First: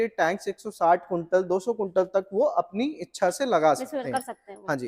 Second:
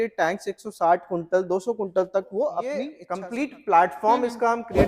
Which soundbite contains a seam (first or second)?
second